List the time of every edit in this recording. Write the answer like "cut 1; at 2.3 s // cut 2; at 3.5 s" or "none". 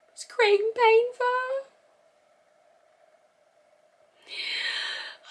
none